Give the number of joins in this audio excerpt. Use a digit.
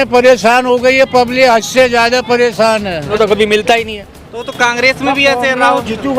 1